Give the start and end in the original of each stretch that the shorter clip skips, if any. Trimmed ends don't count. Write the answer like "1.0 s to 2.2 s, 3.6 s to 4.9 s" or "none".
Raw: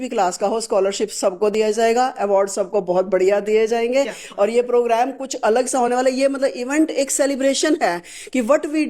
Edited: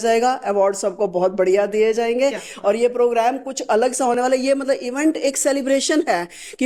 none